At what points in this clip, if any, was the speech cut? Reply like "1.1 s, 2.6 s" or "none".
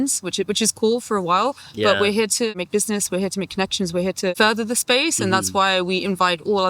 2.6 s, 4.3 s